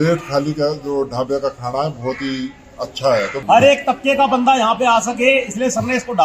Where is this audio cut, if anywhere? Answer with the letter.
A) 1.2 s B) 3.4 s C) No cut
B